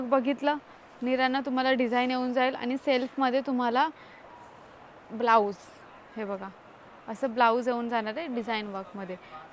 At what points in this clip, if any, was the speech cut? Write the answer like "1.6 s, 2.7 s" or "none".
none

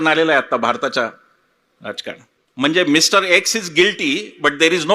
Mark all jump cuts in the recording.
2.4 s

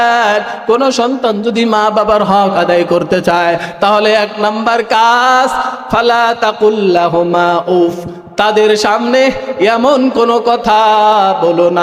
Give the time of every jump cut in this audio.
none

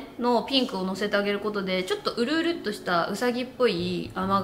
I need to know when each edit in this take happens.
none

